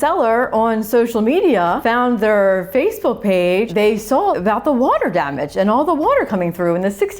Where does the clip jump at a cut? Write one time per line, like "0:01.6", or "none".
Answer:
0:01.8
0:04.0